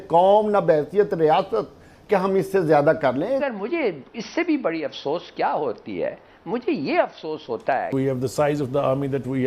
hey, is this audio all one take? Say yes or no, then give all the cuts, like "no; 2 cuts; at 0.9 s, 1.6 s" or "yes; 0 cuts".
no; 2 cuts; at 3.4 s, 7.9 s